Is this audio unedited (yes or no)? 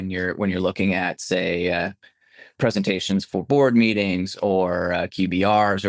yes